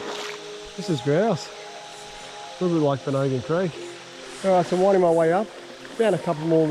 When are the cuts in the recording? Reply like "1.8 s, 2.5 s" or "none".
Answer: 4.4 s